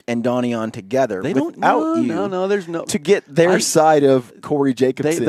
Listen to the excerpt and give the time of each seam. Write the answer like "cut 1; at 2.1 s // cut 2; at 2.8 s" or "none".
none